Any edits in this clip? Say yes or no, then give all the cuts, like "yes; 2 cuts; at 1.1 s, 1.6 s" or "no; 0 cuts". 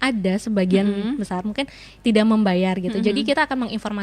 no; 0 cuts